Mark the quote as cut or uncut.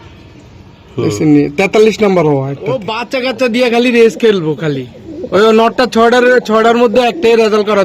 cut